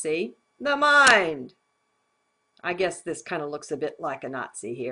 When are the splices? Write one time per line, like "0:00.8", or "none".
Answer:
0:01.4